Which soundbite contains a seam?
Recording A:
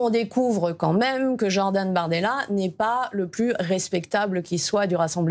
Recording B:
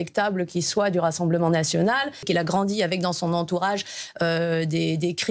B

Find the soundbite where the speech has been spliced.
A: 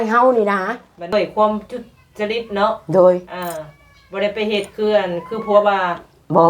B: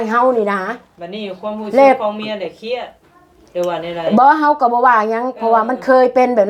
A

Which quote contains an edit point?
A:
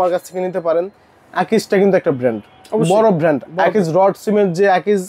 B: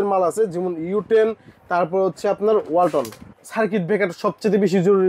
B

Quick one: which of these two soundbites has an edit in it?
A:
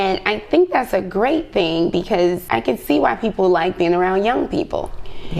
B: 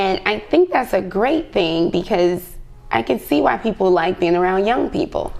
A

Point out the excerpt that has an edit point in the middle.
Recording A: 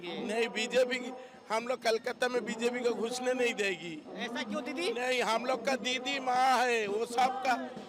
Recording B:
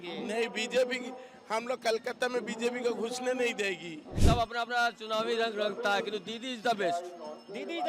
B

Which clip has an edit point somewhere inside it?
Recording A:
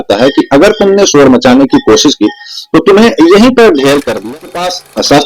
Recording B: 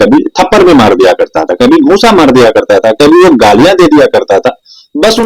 A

